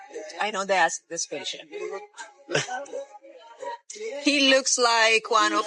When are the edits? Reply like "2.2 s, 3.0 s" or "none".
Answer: none